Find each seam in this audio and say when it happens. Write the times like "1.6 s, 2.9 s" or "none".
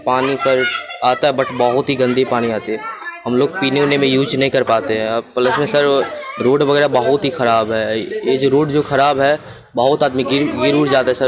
none